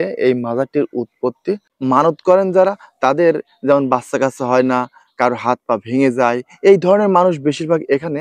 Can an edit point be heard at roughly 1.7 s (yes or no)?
yes